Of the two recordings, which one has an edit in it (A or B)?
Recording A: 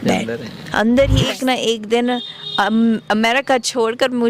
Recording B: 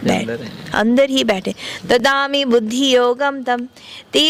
A